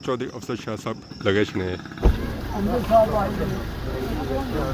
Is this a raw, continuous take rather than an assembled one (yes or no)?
no